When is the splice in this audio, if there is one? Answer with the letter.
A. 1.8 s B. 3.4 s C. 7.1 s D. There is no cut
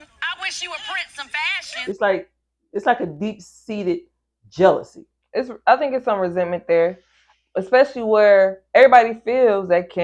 A